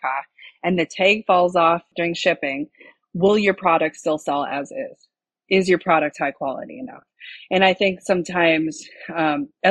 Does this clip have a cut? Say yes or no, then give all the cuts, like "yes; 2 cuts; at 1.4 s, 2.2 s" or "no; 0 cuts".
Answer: yes; 1 cut; at 1.9 s